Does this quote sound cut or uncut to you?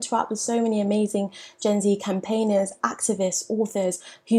uncut